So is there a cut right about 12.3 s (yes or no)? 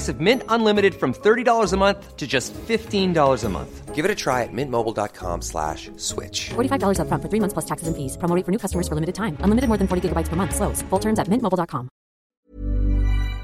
yes